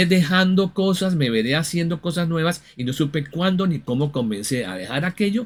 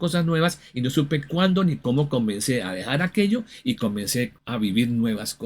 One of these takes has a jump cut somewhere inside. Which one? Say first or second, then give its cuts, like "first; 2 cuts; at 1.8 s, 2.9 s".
second; 1 cut; at 4.4 s